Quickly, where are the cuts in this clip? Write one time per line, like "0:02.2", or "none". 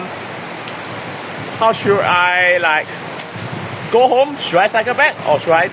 none